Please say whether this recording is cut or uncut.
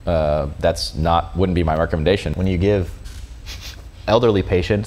cut